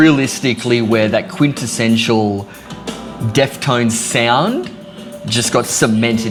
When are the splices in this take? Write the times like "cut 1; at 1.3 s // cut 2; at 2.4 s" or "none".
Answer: none

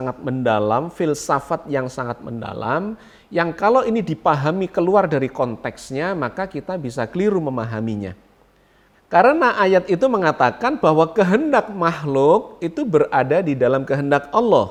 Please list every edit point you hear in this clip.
none

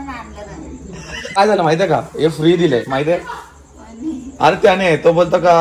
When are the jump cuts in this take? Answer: cut 1; at 1.4 s

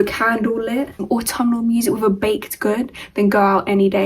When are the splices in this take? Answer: cut 1; at 1.0 s

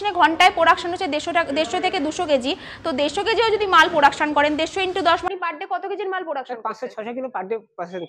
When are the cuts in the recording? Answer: cut 1; at 5.3 s

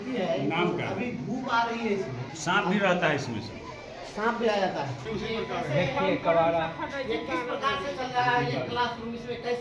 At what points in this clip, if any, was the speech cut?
cut 1; at 2.2 s // cut 2; at 5.0 s

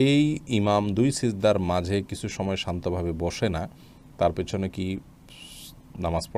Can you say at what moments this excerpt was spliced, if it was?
none

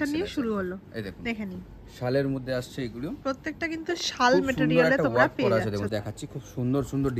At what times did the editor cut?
cut 1; at 5.9 s

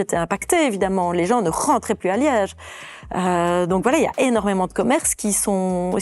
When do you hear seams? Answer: none

